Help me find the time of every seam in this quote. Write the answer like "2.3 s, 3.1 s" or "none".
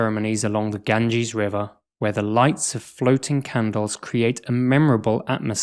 1.8 s